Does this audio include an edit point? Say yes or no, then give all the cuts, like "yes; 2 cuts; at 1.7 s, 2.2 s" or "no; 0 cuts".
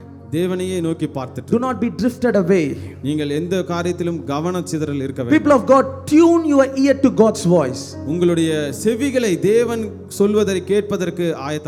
no; 0 cuts